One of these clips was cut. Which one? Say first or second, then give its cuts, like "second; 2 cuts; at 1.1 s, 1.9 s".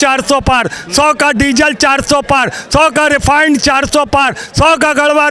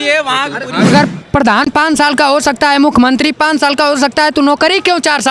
second; 1 cut; at 0.9 s